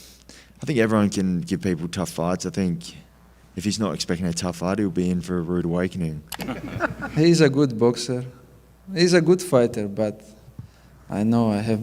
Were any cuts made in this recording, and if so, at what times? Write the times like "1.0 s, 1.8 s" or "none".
5.9 s